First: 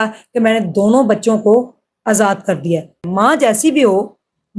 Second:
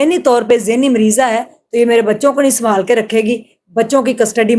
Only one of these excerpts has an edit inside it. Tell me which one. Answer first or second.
first